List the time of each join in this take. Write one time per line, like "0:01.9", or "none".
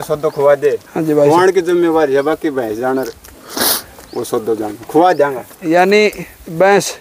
none